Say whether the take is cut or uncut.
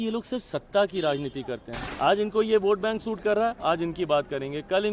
cut